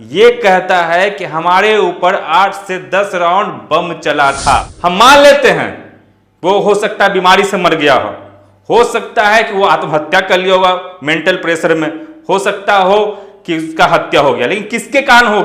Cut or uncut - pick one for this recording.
cut